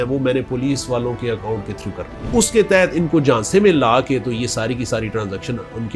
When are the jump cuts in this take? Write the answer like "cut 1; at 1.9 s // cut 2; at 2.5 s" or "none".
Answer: cut 1; at 2.3 s